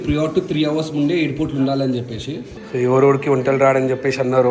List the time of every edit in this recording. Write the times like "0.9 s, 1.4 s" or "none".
2.5 s